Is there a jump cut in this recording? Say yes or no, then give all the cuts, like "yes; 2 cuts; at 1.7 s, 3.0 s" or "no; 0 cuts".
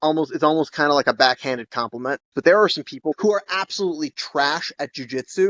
yes; 2 cuts; at 2.3 s, 3.2 s